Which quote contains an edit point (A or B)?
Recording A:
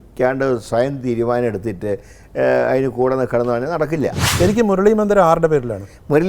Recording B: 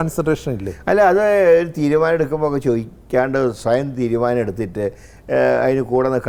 A